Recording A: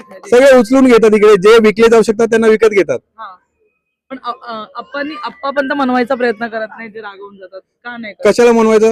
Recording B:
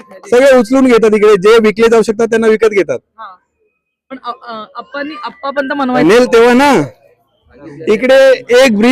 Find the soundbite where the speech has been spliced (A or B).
B